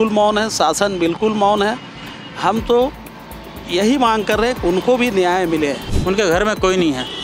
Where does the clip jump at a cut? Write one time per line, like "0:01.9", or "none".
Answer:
0:05.9